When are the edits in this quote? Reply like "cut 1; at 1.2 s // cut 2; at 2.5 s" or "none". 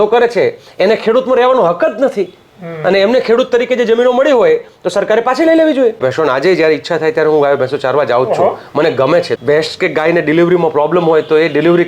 cut 1; at 6.0 s // cut 2; at 9.3 s